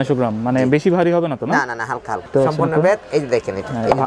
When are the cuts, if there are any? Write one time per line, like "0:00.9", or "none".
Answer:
0:02.3